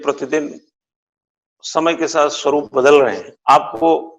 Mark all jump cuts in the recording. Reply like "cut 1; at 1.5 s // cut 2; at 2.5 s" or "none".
cut 1; at 3.3 s